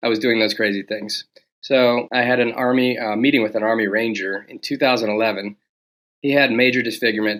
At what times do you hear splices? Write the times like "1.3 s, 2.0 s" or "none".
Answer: none

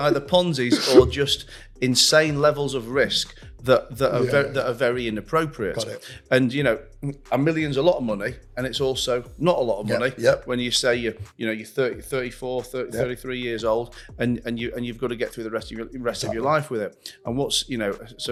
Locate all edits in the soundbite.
none

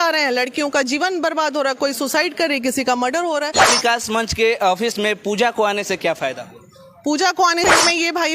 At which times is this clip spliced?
3.5 s, 7.6 s

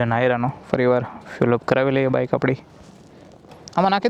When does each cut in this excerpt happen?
none

